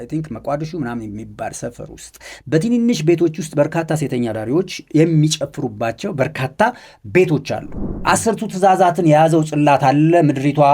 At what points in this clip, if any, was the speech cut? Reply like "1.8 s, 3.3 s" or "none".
7.9 s